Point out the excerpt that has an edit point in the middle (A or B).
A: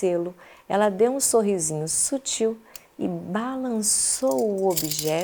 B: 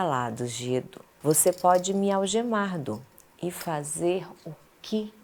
B